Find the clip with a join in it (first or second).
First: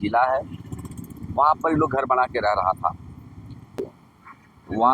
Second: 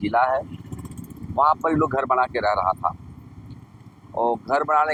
first